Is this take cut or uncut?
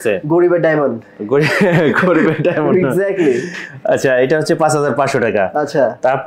uncut